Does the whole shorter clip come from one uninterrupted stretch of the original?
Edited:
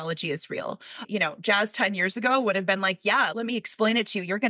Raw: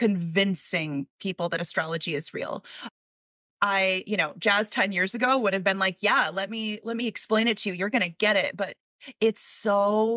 no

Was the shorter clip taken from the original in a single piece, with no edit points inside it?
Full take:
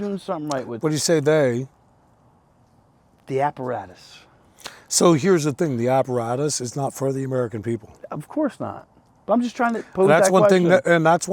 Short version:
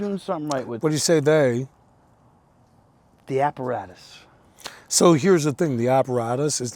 yes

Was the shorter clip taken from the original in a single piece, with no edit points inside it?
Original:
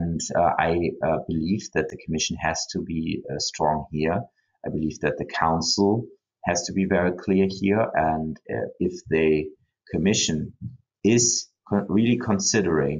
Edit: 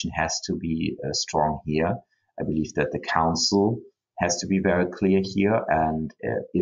yes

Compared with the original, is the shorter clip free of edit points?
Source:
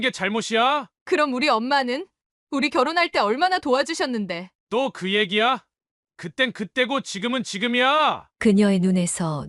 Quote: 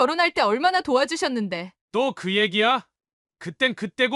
yes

